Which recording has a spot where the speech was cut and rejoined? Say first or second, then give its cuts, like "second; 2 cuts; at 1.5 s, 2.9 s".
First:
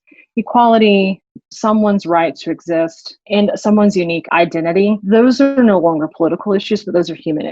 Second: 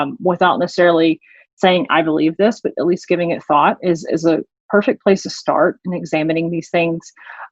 first; 3 cuts; at 1.4 s, 3.2 s, 4.4 s